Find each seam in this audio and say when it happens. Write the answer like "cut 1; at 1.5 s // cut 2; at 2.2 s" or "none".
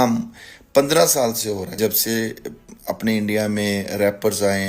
cut 1; at 1.8 s